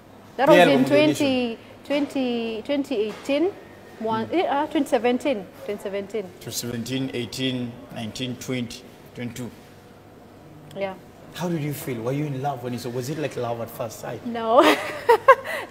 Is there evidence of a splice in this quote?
no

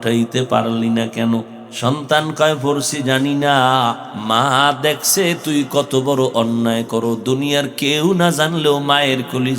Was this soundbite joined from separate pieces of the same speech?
yes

